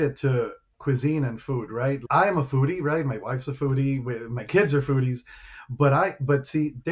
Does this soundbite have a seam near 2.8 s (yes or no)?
no